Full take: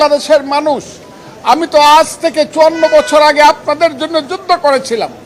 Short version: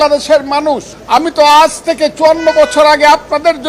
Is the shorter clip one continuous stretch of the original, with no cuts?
no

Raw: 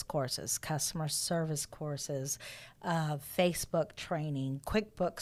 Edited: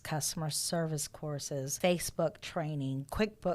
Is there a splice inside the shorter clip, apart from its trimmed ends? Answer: yes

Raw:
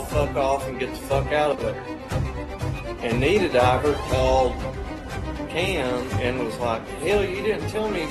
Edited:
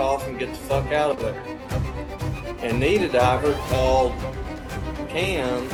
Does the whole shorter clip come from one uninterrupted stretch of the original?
yes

